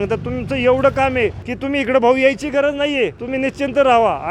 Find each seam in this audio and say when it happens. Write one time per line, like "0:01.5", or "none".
0:01.5
0:03.2